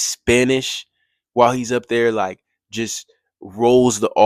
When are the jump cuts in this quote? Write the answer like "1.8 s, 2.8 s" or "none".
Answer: none